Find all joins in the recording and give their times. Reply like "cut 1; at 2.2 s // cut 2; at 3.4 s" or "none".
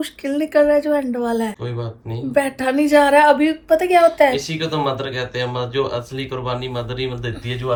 none